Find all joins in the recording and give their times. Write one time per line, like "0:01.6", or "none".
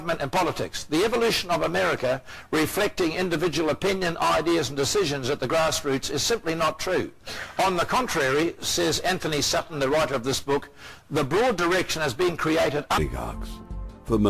none